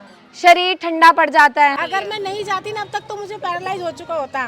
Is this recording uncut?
no; 1 cut; at 1.8 s

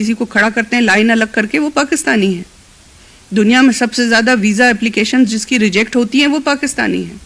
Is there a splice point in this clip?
no; 0 cuts

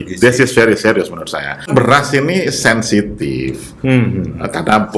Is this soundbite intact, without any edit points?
no; 1 cut; at 1.7 s

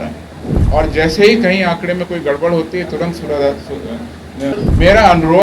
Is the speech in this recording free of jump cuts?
no; 1 cut; at 4.5 s

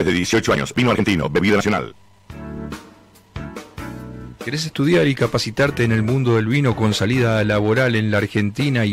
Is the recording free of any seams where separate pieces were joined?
yes; 0 cuts

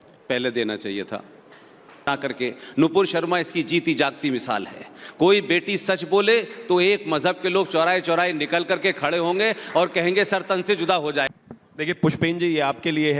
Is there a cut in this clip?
yes; 2 cuts; at 2.1 s, 11.3 s

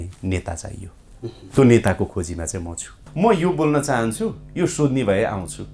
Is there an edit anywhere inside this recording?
yes; 1 cut; at 3.0 s

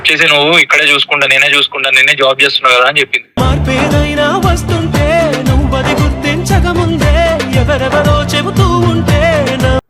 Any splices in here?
no; 0 cuts

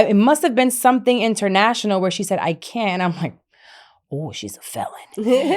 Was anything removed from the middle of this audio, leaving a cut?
no; 0 cuts

